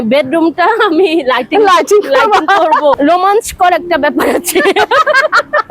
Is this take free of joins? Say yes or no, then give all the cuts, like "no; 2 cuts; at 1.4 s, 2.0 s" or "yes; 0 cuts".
no; 1 cut; at 2.9 s